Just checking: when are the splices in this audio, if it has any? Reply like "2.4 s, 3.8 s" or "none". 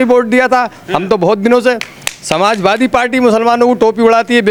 none